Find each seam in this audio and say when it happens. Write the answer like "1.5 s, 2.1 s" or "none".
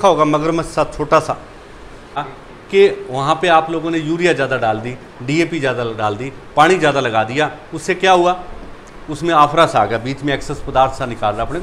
2.2 s